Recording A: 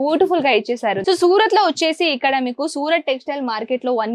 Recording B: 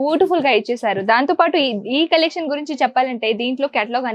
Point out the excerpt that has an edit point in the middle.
A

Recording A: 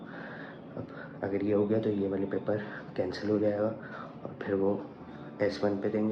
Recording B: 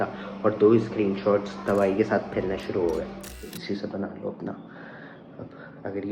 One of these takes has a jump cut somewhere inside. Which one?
B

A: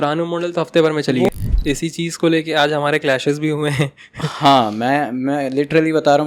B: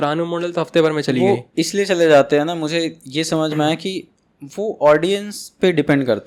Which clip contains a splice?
A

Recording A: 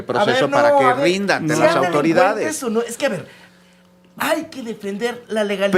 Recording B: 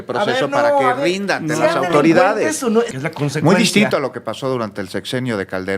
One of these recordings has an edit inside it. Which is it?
B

